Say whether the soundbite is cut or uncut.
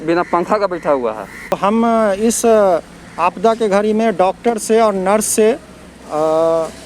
cut